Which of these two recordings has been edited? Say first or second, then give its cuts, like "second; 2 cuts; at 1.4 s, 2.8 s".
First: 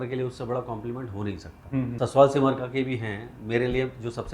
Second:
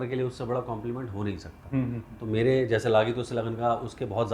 first; 1 cut; at 1.9 s